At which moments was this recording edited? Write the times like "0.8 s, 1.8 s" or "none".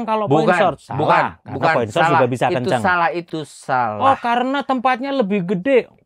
3.3 s

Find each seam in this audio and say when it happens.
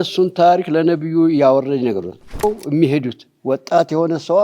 2.4 s

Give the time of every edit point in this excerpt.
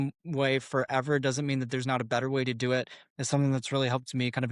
none

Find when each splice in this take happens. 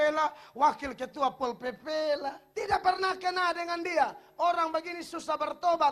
2.4 s

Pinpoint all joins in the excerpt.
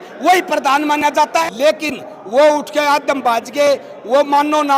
1.4 s

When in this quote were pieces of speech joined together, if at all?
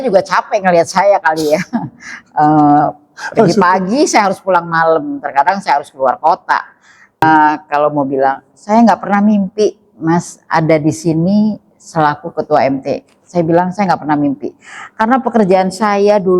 7.2 s

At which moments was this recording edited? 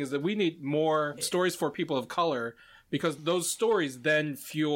1.2 s, 3.2 s

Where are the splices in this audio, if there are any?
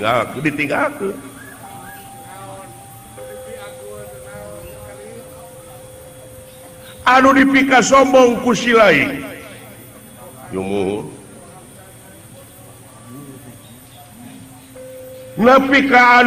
none

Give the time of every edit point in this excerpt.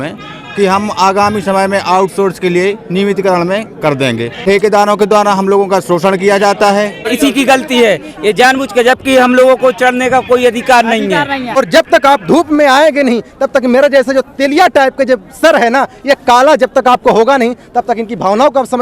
4.3 s, 7.1 s, 11.6 s

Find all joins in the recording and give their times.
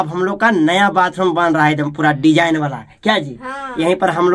none

